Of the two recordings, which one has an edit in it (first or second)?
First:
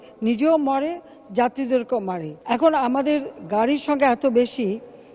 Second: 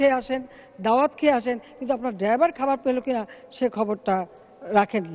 first